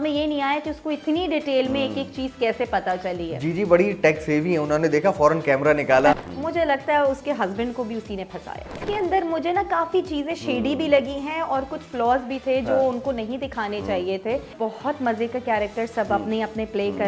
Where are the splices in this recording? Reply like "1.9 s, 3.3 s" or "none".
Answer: 6.2 s, 8.8 s, 14.5 s